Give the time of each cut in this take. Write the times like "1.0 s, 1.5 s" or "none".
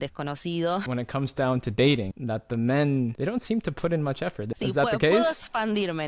0.8 s, 2.1 s, 3.2 s, 4.5 s